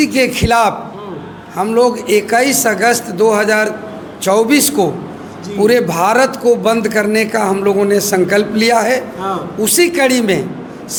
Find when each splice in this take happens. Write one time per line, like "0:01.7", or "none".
none

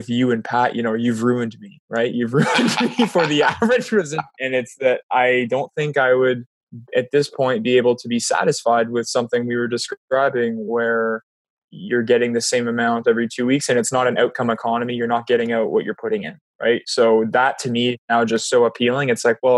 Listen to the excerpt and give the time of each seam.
0:04.3

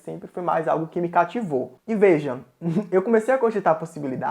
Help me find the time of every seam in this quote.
0:01.7

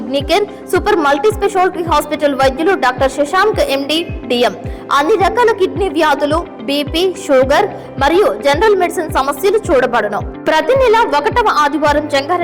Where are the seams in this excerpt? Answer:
none

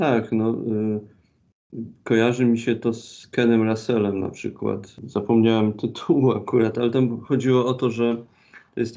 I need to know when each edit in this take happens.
none

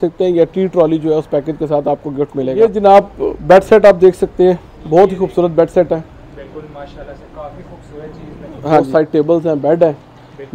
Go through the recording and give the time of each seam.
0:02.5
0:08.9

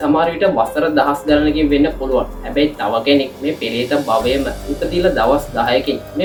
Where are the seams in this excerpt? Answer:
none

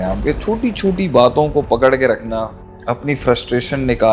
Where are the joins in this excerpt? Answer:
0:02.6

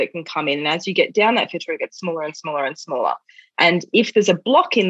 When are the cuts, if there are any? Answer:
none

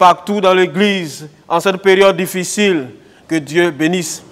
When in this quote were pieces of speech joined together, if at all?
0:03.1

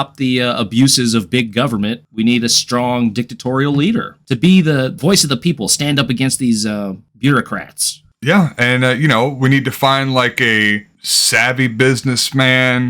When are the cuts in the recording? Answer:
0:04.2

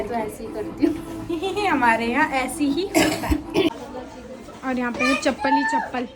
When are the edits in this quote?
none

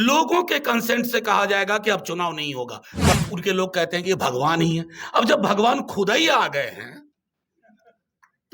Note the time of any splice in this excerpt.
0:03.1

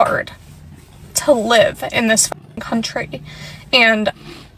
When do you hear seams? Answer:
none

